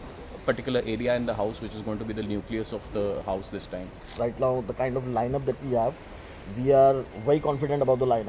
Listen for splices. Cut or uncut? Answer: cut